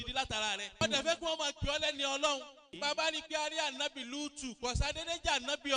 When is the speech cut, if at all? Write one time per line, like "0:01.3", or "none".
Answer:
0:00.8
0:02.8